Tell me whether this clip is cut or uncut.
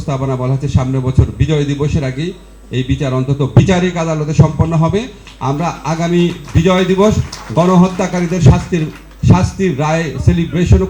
uncut